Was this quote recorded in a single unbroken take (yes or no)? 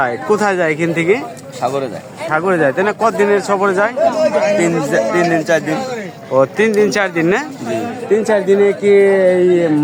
yes